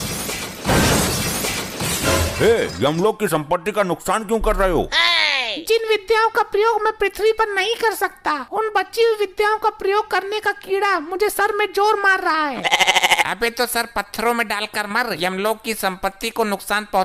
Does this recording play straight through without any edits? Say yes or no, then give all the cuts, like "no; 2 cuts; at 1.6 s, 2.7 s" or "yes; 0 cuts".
yes; 0 cuts